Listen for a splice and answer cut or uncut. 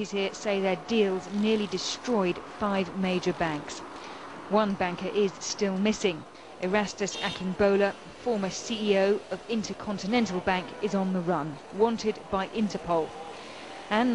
cut